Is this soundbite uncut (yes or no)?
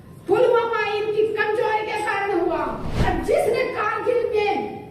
no